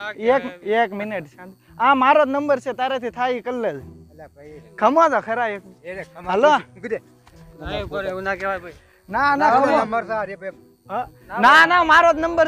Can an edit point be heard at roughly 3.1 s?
no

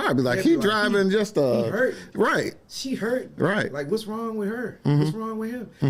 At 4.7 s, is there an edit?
no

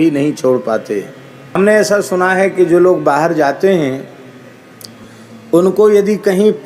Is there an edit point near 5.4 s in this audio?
no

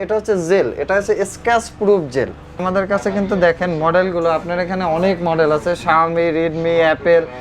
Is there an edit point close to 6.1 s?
no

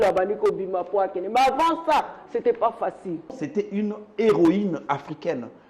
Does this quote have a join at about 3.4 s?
yes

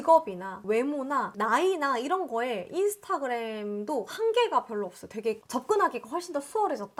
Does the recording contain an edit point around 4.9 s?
no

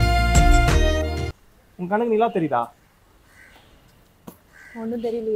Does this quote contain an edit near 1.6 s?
yes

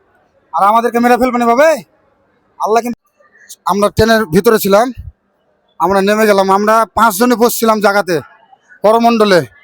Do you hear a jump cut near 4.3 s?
no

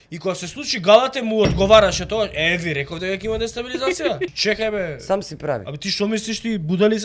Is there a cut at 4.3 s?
yes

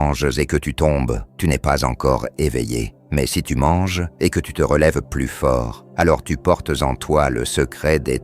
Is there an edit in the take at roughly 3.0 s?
yes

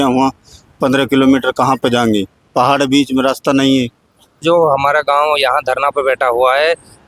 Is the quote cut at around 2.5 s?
no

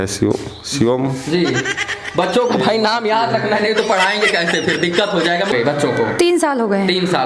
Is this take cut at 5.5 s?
yes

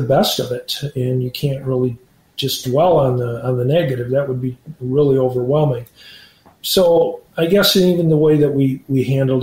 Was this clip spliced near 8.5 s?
no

